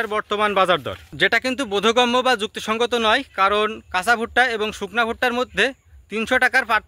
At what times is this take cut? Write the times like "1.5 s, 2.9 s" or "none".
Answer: 1.0 s